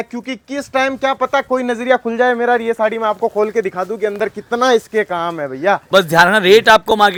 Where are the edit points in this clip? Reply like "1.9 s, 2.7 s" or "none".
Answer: none